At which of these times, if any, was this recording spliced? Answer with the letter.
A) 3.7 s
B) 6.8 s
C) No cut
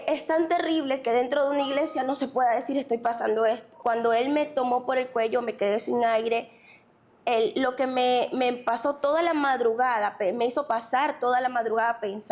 A